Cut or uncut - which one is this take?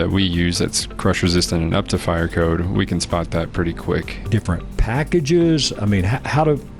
cut